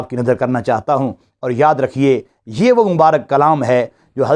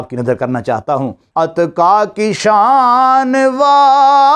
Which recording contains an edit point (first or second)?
second